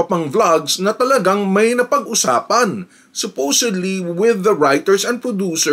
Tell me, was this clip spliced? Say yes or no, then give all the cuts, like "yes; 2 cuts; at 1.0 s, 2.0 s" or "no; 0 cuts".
no; 0 cuts